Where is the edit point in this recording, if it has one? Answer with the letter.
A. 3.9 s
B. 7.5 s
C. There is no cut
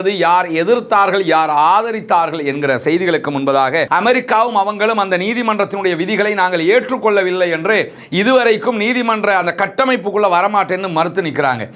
A